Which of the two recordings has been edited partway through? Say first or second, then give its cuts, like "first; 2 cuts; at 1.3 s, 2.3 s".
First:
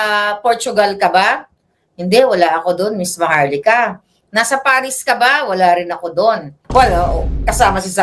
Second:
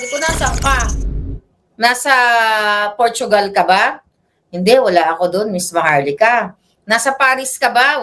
first; 1 cut; at 6.5 s